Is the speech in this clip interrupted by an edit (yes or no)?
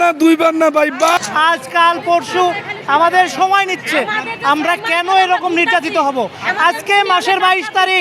yes